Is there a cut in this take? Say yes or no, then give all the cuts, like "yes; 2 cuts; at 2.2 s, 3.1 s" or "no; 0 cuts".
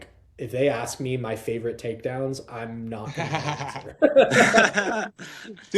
no; 0 cuts